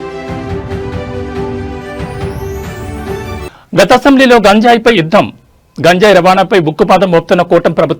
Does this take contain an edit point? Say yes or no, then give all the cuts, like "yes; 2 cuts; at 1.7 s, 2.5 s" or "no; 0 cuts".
yes; 1 cut; at 3.1 s